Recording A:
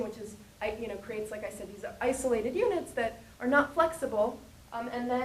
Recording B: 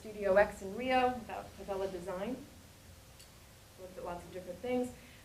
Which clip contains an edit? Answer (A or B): A